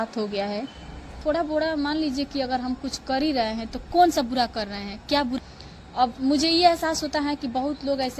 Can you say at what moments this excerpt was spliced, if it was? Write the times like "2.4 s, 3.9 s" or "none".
1.2 s, 5.4 s

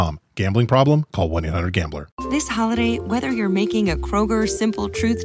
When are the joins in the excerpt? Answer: 2.1 s

